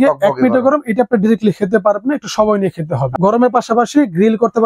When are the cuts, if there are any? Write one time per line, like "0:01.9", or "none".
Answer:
0:03.1